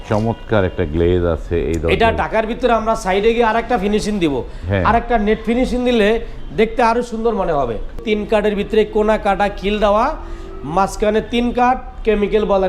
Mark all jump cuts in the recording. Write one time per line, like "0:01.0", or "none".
0:08.0